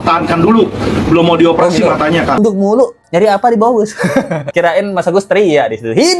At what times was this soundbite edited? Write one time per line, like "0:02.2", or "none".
0:02.4
0:04.5